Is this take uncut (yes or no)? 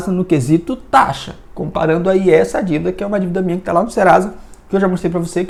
yes